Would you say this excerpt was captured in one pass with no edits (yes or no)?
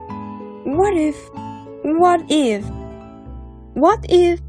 yes